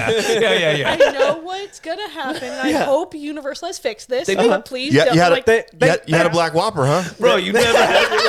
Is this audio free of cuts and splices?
yes; 0 cuts

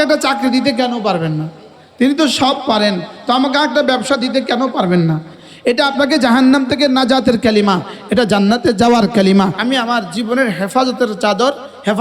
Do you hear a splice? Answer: yes; 2 cuts; at 5.4 s, 9.6 s

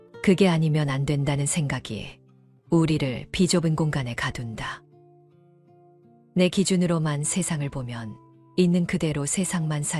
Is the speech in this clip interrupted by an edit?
no; 0 cuts

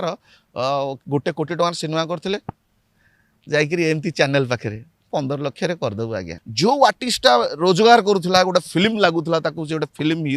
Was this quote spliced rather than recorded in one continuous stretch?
yes; 1 cut; at 6.4 s

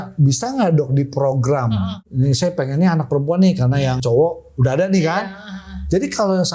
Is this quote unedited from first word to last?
no; 2 cuts; at 2.0 s, 4.0 s

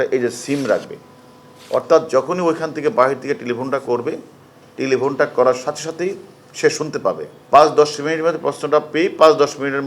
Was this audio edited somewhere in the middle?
yes; 1 cut; at 7.3 s

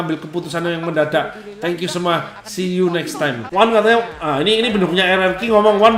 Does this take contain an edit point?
yes; 1 cut; at 3.4 s

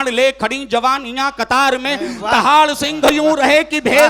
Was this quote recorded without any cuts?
yes; 0 cuts

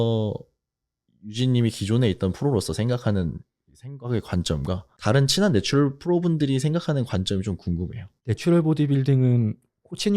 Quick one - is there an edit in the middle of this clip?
yes; 1 cut; at 8.1 s

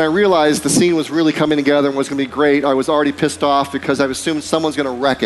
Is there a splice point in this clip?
no; 0 cuts

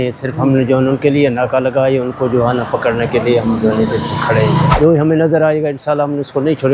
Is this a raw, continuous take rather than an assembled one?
no; 1 cut; at 4.7 s

